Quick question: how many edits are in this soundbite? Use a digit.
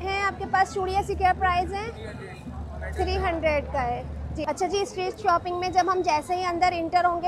0